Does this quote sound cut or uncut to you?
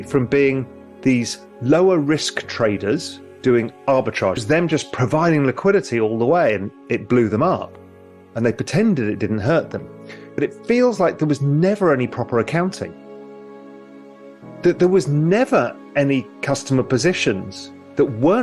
cut